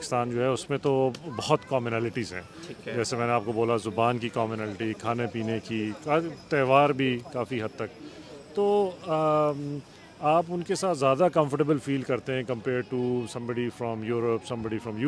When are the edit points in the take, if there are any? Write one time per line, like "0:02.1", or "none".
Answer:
none